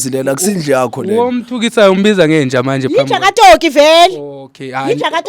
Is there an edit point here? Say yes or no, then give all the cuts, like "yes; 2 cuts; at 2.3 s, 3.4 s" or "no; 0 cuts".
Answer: no; 0 cuts